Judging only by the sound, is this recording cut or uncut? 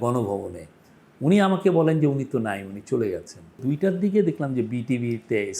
cut